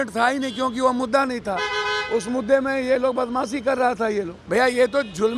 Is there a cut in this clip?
yes; 1 cut; at 4.4 s

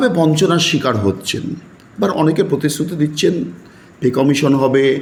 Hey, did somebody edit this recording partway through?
no; 0 cuts

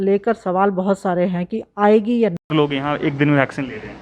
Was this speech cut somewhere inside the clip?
yes; 1 cut; at 2.5 s

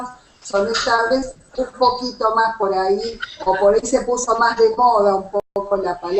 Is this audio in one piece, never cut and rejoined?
yes; 0 cuts

